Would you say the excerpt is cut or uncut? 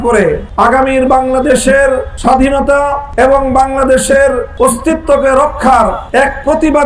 cut